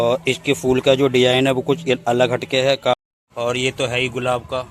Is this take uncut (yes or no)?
no